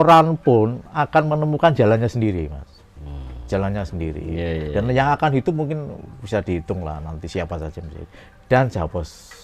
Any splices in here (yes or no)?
no